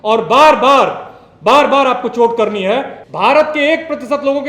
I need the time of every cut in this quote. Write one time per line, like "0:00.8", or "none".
0:03.0